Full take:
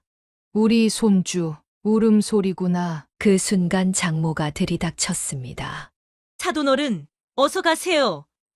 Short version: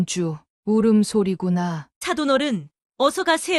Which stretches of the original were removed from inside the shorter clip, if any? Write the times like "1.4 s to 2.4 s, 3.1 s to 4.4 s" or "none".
3.0 s to 6.2 s